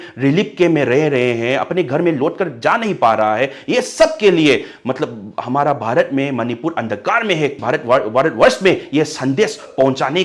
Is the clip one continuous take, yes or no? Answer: no